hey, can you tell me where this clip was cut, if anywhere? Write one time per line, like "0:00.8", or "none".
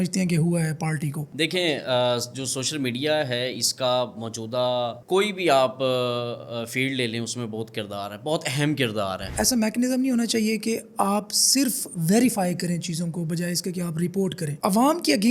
0:01.3
0:05.0
0:09.3
0:14.6